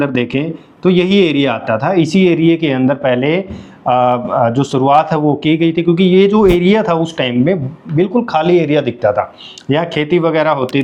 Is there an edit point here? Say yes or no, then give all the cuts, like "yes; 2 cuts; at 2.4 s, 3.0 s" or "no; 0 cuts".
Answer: no; 0 cuts